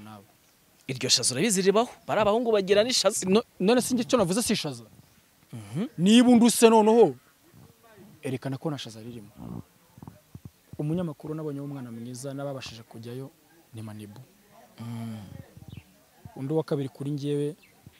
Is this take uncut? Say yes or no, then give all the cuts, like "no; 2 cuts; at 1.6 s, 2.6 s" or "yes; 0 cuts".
no; 1 cut; at 10.3 s